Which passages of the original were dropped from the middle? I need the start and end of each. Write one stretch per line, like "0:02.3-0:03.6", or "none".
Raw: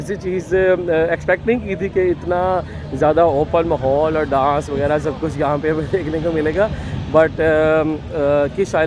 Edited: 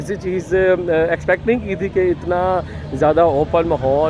none